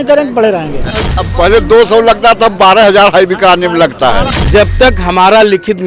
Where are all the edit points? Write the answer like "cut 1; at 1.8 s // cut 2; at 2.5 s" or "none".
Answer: cut 1; at 1.1 s // cut 2; at 4.3 s